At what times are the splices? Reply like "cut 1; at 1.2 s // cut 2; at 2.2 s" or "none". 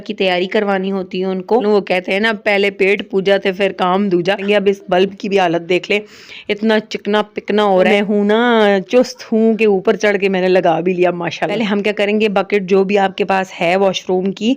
cut 1; at 1.6 s // cut 2; at 4.4 s // cut 3; at 7.9 s // cut 4; at 11.5 s